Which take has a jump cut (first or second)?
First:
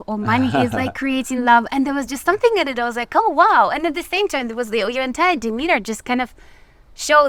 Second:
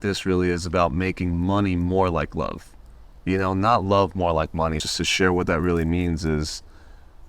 second